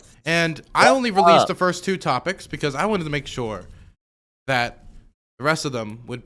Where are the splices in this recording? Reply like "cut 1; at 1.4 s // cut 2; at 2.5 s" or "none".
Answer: none